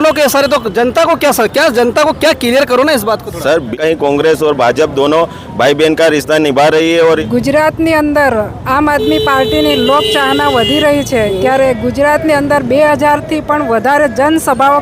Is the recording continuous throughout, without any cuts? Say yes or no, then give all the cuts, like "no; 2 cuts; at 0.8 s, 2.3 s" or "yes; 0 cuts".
no; 2 cuts; at 3.7 s, 7.2 s